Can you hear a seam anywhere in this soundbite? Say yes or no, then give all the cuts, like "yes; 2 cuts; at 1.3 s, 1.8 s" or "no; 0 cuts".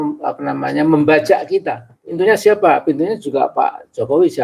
yes; 1 cut; at 2.2 s